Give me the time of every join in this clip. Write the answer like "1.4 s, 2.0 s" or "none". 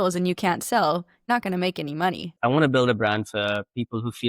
1.3 s, 2.3 s